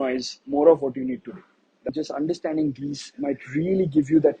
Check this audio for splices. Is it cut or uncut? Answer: cut